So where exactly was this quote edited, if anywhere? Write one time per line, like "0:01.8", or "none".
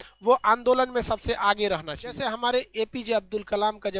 0:02.2